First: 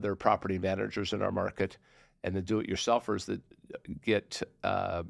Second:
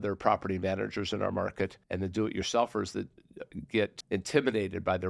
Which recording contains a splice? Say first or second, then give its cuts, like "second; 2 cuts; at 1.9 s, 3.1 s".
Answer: second; 2 cuts; at 1.8 s, 4.0 s